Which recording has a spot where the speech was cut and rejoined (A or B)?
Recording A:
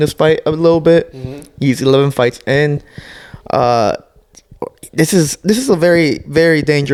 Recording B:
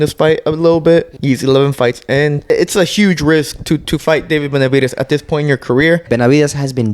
B